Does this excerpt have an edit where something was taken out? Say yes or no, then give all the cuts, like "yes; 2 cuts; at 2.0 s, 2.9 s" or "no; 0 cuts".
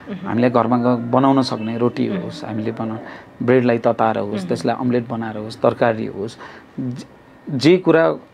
no; 0 cuts